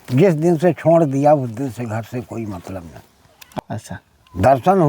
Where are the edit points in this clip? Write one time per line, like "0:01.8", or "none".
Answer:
0:03.6

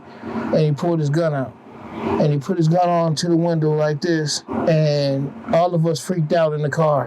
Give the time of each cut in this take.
0:02.1
0:04.4

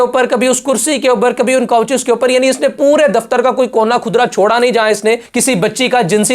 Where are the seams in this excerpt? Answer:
0:05.3

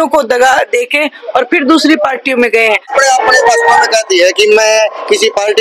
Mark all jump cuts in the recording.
0:02.9

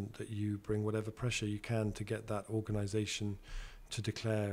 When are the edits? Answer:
none

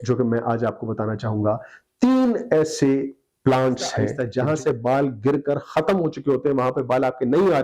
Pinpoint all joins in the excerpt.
0:04.2

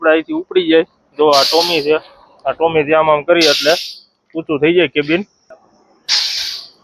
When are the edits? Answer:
0:05.4

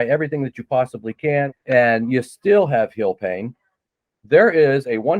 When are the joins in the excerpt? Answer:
0:01.5

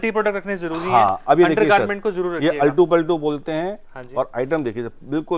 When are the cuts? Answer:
none

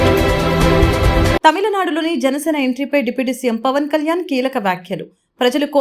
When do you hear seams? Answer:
0:01.1

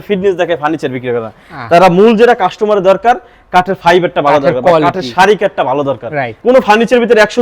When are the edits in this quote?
0:06.4

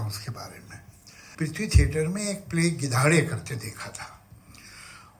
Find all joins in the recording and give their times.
0:01.2

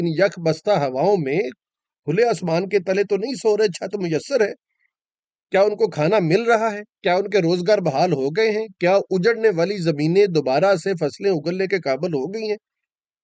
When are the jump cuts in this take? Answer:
none

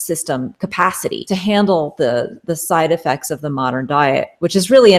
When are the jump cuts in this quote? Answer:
0:01.1

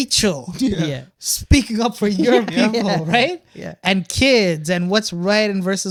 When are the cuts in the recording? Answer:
none

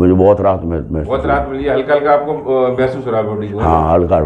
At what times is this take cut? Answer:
none

